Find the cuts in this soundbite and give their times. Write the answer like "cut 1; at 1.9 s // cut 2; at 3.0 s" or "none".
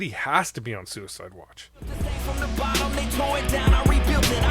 cut 1; at 1.9 s